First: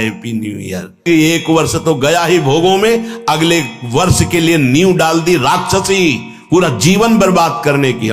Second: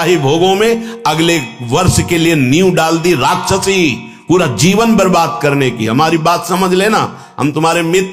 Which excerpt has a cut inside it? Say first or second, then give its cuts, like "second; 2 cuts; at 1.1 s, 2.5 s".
first; 1 cut; at 1.1 s